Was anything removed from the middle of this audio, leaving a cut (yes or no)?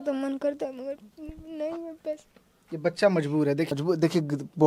yes